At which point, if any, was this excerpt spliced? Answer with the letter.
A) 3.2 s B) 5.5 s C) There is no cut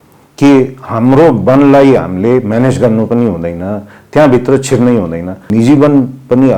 B